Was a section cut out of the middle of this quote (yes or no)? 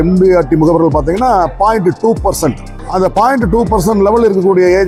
no